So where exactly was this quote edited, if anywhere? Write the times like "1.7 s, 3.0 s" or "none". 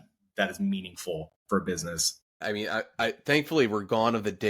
2.4 s